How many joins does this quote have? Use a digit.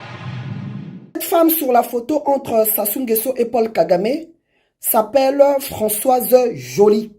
1